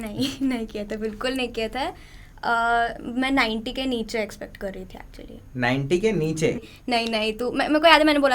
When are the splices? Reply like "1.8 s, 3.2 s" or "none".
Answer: 6.6 s